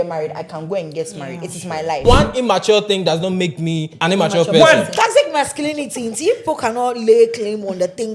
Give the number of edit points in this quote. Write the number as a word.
three